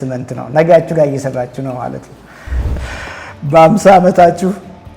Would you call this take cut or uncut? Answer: cut